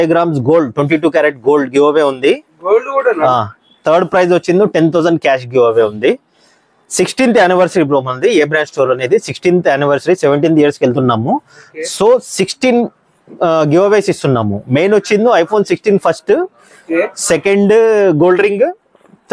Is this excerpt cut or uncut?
uncut